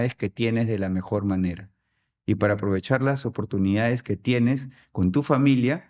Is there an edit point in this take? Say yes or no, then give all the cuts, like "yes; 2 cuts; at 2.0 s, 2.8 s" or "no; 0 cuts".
no; 0 cuts